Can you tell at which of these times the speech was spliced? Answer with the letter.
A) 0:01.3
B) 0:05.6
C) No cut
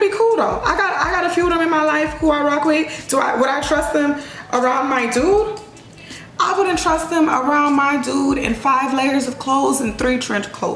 C